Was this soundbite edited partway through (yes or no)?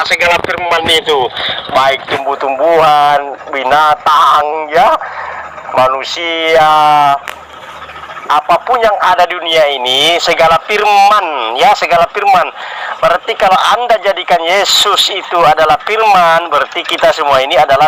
no